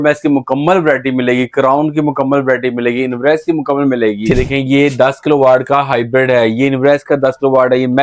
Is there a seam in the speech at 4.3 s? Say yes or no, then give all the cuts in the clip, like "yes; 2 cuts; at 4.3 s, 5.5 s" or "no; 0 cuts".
yes; 1 cut; at 4.3 s